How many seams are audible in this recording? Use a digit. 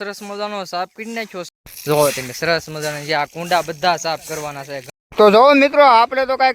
2